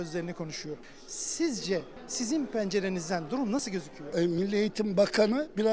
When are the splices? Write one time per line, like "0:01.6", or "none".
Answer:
0:00.9
0:02.0
0:04.0